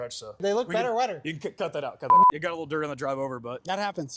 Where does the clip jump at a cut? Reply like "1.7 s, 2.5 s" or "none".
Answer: none